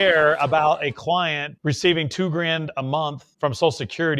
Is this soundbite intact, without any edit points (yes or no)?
no